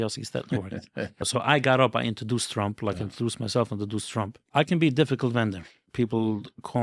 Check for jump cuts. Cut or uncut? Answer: cut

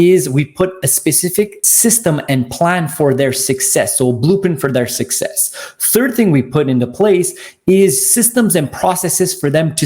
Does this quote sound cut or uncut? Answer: cut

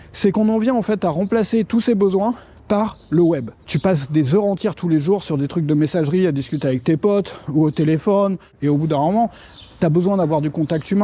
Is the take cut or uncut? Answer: cut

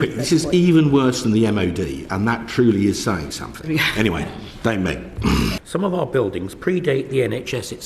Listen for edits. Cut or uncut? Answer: cut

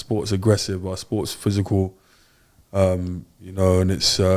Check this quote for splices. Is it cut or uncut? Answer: uncut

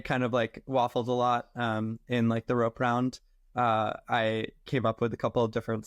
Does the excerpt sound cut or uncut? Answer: uncut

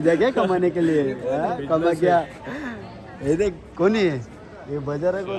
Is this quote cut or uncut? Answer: uncut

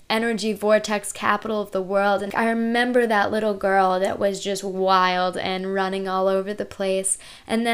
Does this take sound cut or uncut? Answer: cut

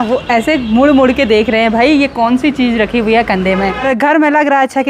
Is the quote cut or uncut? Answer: cut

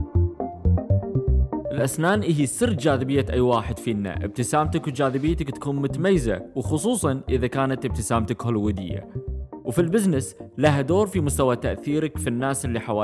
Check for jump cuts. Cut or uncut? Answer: cut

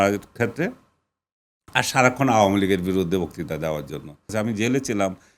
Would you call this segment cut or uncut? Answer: cut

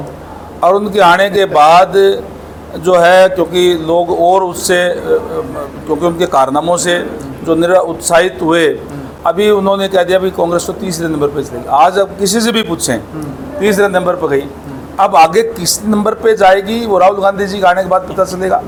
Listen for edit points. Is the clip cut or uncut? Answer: uncut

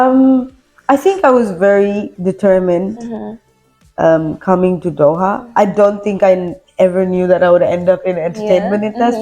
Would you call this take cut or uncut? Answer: uncut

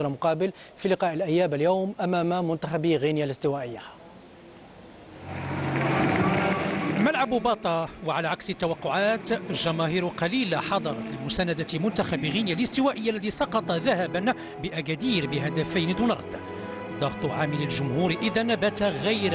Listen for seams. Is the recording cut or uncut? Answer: cut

